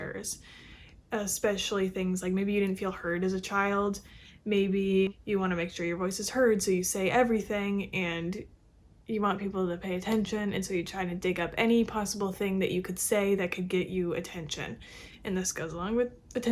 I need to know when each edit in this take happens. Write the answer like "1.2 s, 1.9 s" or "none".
5.1 s